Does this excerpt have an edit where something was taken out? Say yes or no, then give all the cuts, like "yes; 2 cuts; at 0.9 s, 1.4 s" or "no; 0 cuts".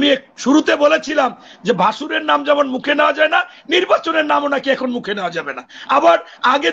no; 0 cuts